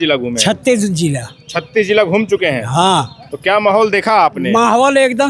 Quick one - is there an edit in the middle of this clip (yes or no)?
no